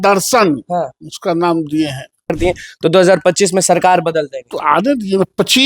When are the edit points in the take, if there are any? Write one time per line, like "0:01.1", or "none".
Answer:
0:02.4
0:04.4

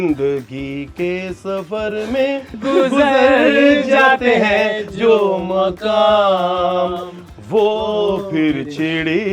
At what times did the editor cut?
none

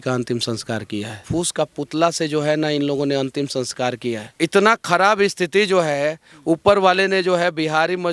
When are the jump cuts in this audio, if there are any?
0:01.2
0:04.3

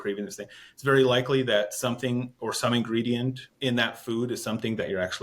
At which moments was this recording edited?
0:03.5

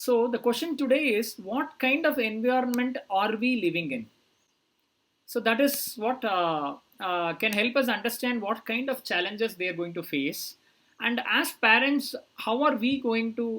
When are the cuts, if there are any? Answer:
none

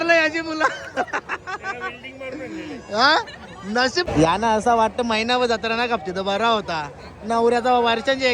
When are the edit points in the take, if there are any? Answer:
0:04.1

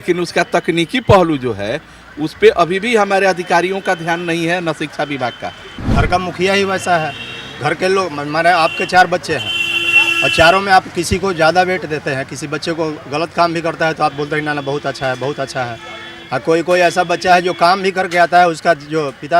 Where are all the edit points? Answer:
0:05.8

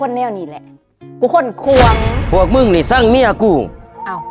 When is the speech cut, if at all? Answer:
0:02.1

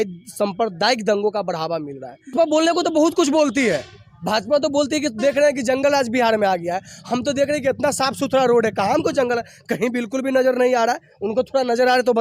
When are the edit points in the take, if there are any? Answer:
0:02.3

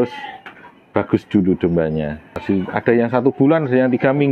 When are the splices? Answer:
0:02.4

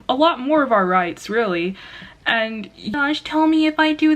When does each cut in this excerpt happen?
0:02.9

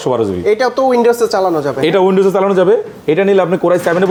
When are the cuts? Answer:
none

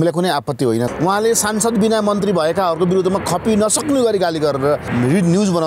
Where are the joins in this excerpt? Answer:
0:00.9
0:04.9

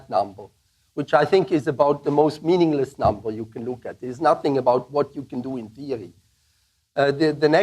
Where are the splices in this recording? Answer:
0:01.5

